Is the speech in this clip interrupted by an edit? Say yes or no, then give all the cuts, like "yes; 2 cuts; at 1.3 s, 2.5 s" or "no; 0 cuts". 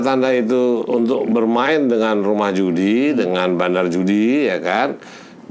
no; 0 cuts